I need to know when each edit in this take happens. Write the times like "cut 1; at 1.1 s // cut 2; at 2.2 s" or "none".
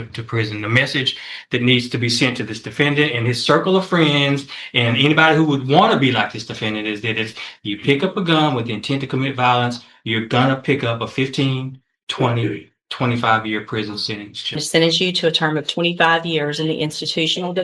cut 1; at 14.6 s